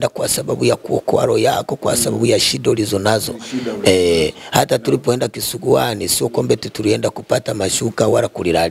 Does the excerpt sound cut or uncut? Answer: uncut